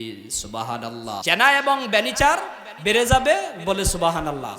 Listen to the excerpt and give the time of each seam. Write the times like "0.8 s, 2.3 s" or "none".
1.2 s